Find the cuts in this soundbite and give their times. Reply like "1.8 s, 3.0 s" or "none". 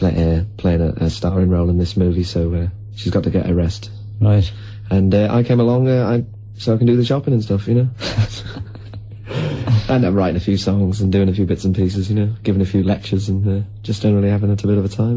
10.8 s